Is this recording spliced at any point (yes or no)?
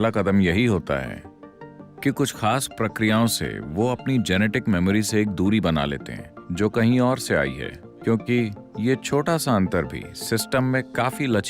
no